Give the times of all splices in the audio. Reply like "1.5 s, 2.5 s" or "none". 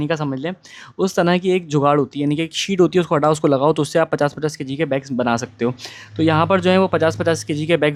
none